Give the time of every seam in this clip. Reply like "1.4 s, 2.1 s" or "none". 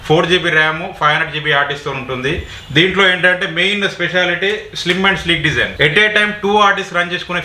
5.7 s